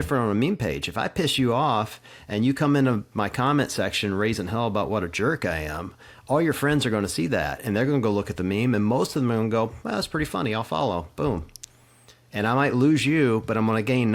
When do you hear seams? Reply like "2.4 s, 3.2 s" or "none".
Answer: none